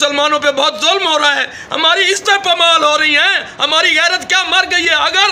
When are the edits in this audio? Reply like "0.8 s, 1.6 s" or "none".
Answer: none